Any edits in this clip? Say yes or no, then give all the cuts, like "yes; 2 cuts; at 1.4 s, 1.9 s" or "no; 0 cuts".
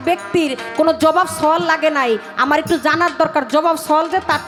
no; 0 cuts